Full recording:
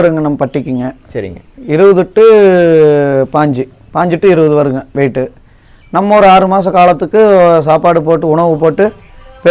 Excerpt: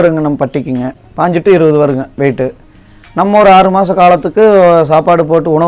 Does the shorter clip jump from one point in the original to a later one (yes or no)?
yes